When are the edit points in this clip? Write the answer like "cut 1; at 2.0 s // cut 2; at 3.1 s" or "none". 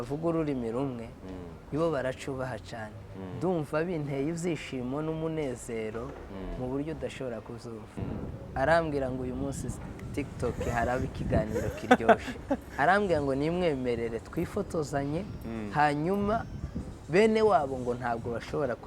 cut 1; at 7.9 s